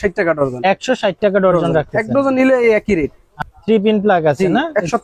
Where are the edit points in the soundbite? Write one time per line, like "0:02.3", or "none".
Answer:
0:03.3

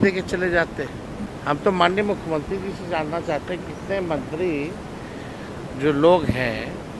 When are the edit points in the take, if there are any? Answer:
0:01.1

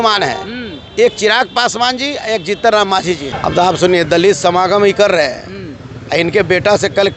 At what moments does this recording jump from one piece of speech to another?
0:03.3

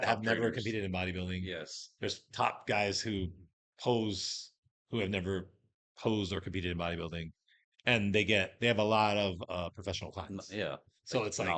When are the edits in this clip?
none

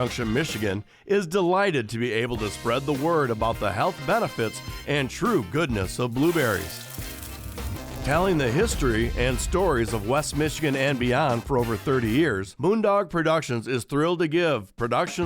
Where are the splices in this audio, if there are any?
0:12.5

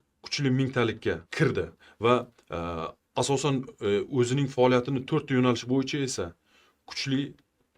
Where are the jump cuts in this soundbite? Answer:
0:01.3

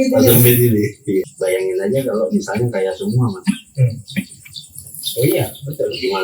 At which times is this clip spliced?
0:01.3

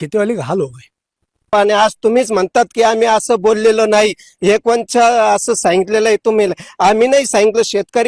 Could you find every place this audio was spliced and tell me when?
0:01.5

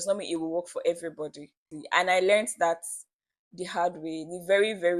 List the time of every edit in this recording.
none

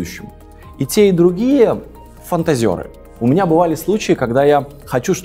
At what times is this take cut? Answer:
0:03.0

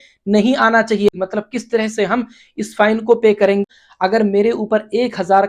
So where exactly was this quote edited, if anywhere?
0:01.1
0:03.6

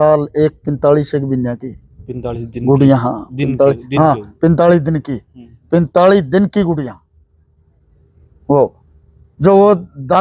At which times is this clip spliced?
none

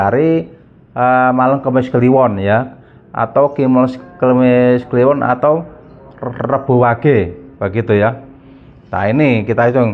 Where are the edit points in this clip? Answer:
none

